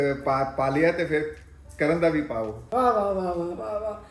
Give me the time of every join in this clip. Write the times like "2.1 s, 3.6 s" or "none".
2.6 s

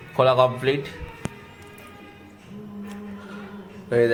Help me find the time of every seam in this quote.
none

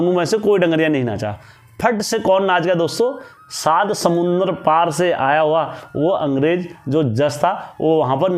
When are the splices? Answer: none

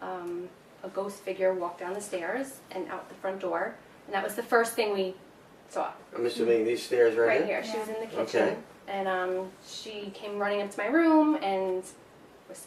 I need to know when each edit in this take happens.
3.8 s

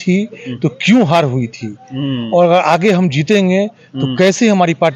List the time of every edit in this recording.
none

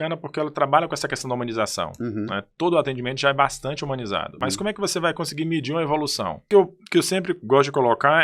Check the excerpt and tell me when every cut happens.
4.4 s, 6.4 s

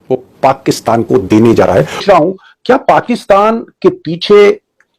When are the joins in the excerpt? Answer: 2.0 s

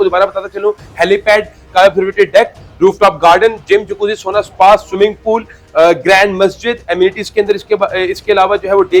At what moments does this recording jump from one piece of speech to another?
1.6 s

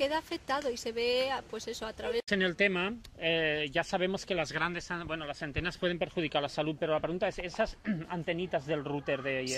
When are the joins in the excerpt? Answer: 2.3 s

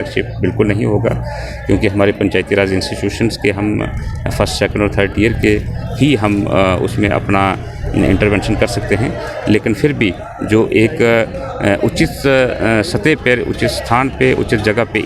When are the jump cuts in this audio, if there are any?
none

